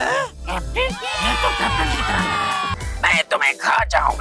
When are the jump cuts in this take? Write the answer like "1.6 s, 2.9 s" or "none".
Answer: 2.7 s